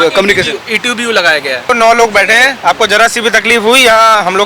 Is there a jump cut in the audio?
yes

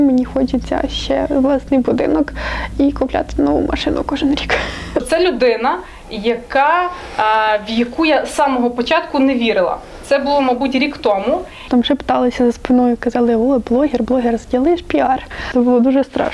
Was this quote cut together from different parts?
yes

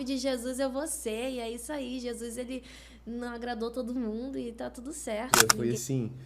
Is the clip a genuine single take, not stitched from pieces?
no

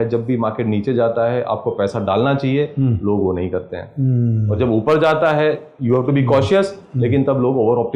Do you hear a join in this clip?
no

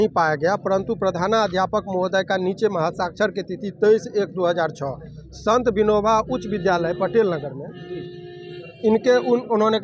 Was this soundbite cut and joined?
no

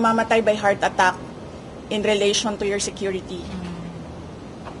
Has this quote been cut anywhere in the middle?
no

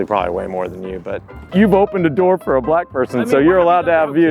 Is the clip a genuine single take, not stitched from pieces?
no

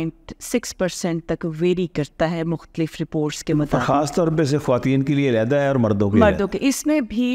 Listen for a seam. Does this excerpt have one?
no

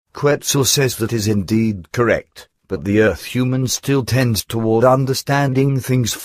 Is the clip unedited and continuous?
yes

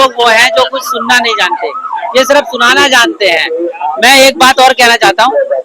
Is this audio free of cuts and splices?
yes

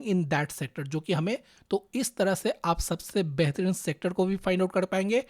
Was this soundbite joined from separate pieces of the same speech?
yes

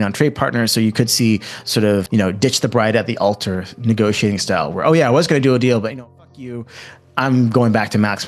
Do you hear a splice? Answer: yes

